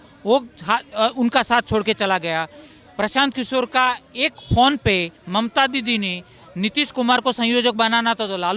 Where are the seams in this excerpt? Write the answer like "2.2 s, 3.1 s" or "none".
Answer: none